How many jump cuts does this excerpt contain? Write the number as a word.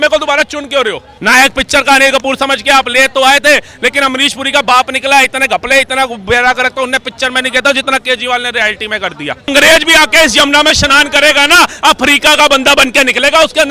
two